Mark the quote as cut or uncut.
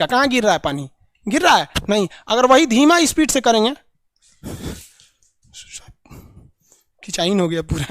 uncut